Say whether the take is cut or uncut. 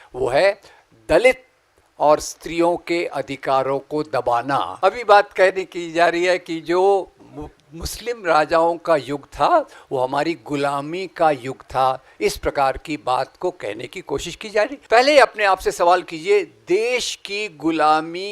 cut